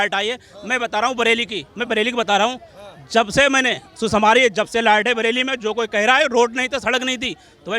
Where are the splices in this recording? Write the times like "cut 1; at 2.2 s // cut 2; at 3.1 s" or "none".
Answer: none